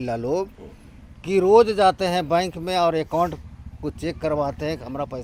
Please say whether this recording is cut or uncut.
uncut